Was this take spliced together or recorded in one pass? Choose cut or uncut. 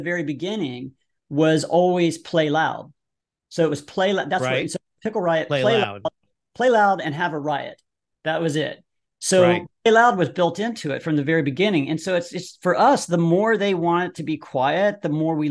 uncut